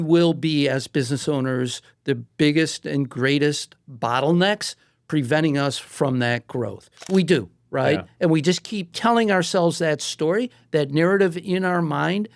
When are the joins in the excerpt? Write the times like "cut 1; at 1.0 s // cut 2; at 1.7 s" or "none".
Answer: cut 1; at 7.1 s // cut 2; at 8.9 s